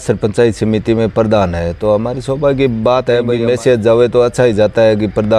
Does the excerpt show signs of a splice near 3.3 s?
yes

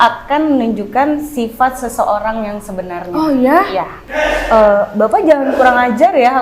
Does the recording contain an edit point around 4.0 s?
yes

